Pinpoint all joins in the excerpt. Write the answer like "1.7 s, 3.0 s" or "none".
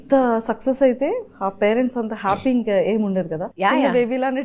3.4 s